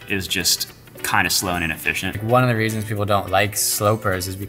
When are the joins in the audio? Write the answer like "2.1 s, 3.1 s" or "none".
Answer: 2.2 s

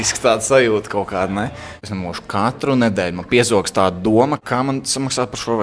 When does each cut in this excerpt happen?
1.8 s, 4.4 s

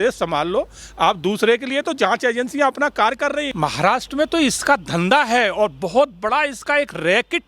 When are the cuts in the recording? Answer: 3.5 s

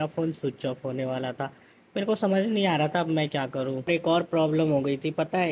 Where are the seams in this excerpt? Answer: 3.9 s

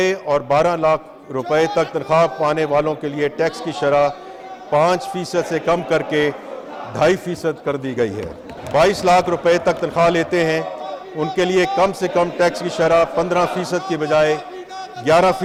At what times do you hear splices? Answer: none

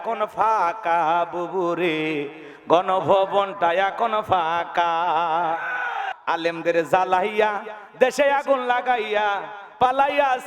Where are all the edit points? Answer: 6.1 s

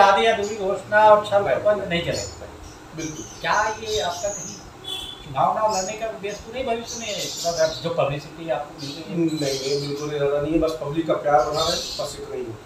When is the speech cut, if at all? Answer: none

